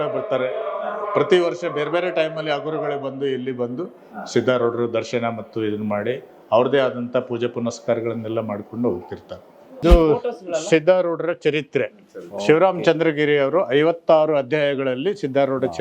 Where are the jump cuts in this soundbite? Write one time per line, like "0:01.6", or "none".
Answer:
0:09.8